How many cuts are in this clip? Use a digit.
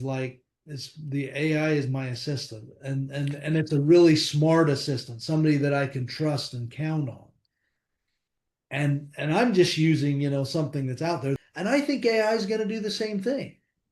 1